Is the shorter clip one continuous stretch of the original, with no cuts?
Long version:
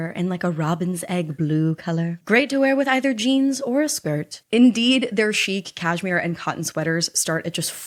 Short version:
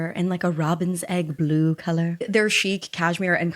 no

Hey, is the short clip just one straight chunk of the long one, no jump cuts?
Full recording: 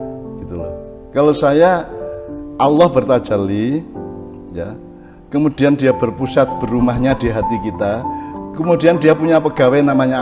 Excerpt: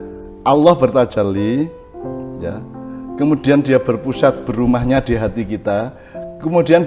yes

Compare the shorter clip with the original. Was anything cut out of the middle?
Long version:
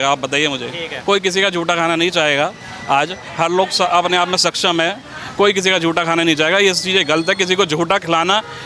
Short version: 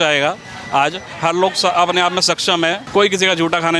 yes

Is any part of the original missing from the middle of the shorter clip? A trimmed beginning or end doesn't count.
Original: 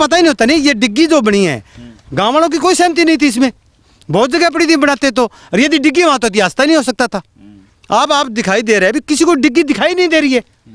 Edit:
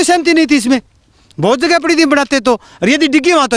no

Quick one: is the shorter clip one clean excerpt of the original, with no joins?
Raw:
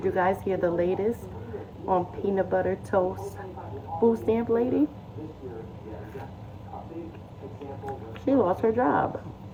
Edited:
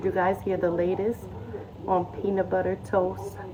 yes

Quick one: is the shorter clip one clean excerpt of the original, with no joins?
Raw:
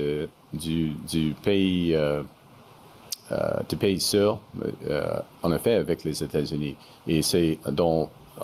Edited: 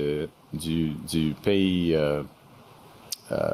yes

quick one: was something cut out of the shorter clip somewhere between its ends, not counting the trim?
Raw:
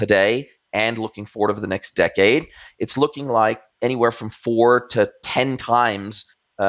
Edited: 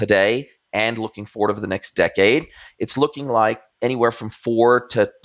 no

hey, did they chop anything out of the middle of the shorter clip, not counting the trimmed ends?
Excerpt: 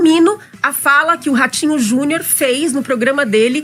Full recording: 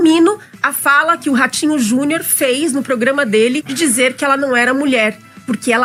no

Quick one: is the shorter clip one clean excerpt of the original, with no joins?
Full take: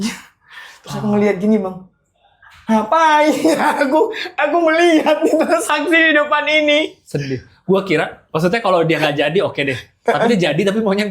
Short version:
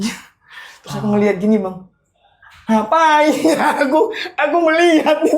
yes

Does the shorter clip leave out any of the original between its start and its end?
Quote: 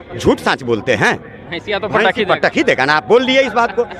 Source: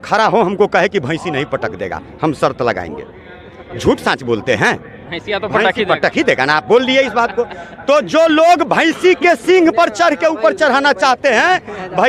no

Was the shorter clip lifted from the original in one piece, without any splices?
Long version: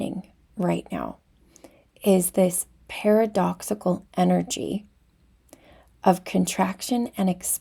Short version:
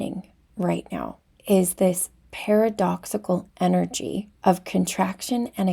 no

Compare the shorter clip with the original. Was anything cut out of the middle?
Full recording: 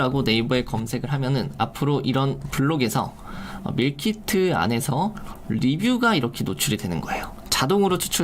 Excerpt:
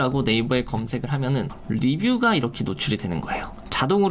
yes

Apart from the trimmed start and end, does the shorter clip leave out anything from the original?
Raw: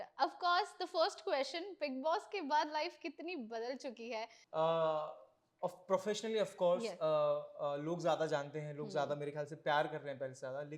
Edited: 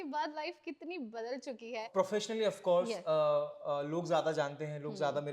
yes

